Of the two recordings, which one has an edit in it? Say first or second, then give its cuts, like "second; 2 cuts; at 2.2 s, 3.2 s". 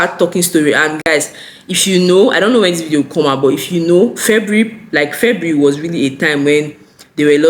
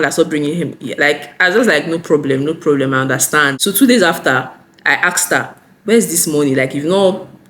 second; 1 cut; at 3.5 s